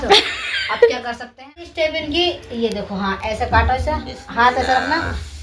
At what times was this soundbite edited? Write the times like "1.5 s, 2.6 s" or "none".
1.7 s